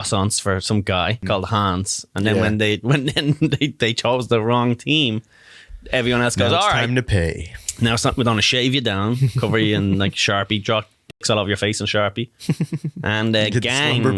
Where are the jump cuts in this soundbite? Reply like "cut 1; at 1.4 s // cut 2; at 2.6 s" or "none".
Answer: cut 1; at 1.2 s